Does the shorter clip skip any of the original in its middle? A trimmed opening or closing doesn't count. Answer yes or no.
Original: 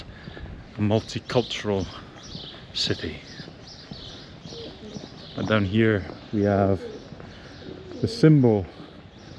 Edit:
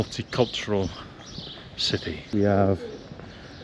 yes